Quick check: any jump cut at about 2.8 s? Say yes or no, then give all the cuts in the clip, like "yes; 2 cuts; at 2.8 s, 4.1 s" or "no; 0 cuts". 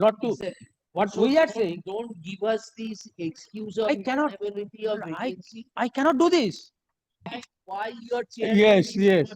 no; 1 cut; at 7.3 s